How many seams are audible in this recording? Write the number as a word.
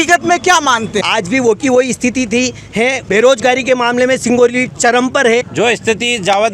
three